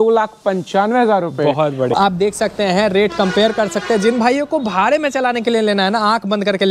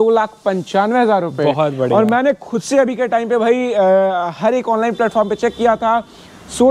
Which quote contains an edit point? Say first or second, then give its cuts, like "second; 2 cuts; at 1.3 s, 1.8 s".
first; 1 cut; at 1.9 s